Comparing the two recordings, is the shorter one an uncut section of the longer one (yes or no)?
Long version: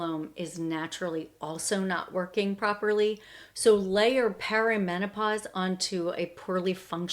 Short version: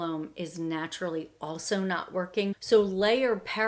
no